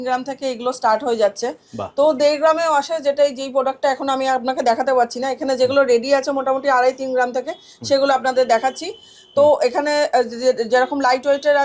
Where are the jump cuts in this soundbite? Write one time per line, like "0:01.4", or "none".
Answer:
none